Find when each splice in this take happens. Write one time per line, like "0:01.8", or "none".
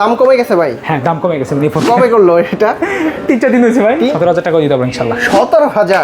0:04.1